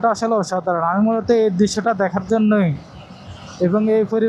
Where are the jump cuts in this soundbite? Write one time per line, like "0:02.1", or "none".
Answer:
none